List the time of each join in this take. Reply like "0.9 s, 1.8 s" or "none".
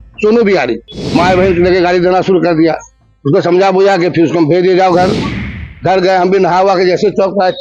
0.9 s